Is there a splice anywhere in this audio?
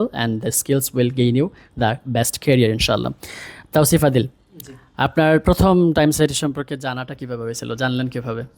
no; 0 cuts

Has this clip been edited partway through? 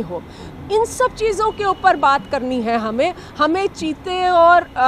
no; 0 cuts

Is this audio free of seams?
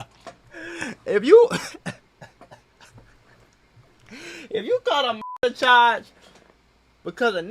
yes; 0 cuts

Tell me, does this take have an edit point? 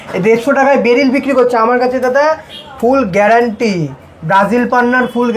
no; 0 cuts

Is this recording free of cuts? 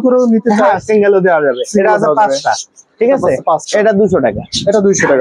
yes; 0 cuts

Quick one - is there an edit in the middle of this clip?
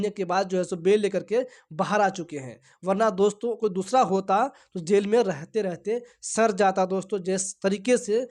no; 0 cuts

